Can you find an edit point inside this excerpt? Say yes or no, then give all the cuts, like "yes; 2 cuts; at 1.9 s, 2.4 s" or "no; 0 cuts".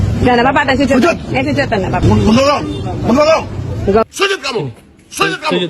yes; 2 cuts; at 2.0 s, 4.0 s